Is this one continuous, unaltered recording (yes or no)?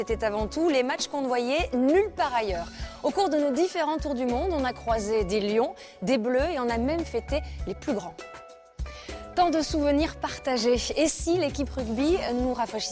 yes